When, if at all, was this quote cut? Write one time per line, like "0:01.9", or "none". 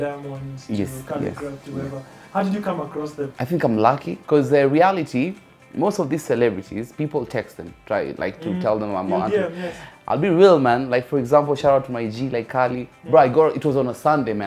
0:03.3
0:04.1